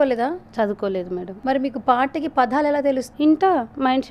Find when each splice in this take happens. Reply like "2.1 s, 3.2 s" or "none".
1.3 s, 3.1 s